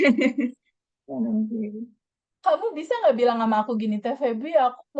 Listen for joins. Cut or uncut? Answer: uncut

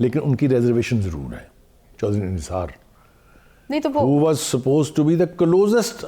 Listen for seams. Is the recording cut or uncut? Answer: cut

